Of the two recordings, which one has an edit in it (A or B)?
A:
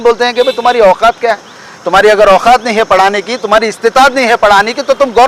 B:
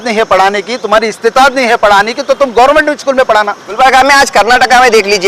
B